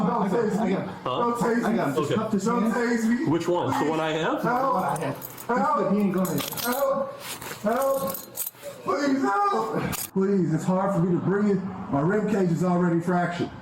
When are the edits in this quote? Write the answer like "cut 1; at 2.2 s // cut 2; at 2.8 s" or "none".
cut 1; at 10.0 s